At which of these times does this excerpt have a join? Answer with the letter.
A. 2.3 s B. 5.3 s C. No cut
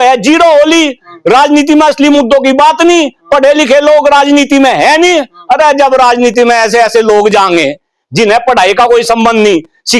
C